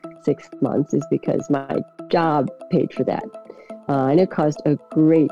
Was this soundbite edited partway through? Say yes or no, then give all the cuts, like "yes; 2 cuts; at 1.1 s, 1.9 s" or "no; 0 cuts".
yes; 1 cut; at 2.0 s